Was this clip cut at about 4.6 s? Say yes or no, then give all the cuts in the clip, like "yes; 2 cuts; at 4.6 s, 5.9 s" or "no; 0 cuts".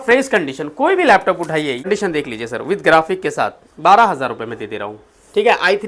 no; 1 cut; at 1.9 s